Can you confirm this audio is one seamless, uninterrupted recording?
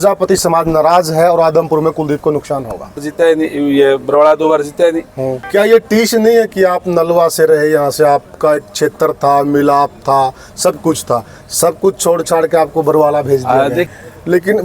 no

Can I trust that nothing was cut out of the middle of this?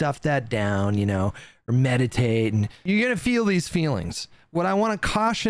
no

